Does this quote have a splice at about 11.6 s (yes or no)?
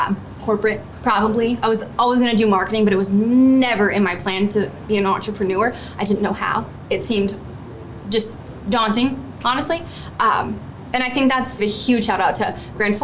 yes